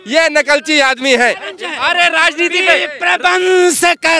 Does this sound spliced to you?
no; 0 cuts

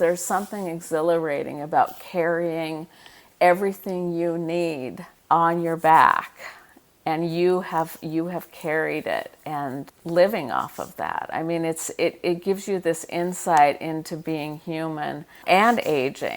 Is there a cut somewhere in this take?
yes; 3 cuts; at 4.7 s, 9.9 s, 15.5 s

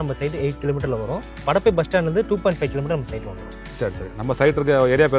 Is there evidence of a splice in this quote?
no; 0 cuts

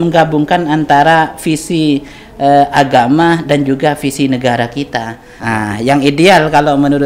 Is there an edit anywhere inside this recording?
yes; 1 cut; at 5.3 s

